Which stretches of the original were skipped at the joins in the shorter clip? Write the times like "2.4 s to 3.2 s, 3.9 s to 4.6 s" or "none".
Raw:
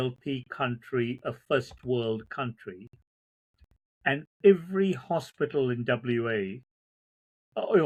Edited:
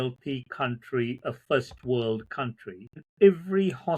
3.1 s to 4.3 s